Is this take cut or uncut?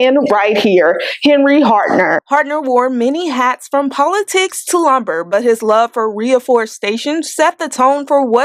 uncut